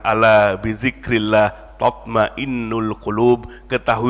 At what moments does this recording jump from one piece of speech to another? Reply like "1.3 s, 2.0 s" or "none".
none